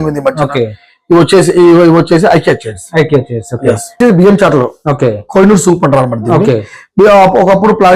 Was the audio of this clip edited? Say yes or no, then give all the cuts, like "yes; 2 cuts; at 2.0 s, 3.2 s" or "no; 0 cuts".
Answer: yes; 1 cut; at 3.9 s